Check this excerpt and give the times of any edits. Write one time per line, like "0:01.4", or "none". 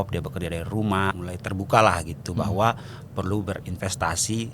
0:01.2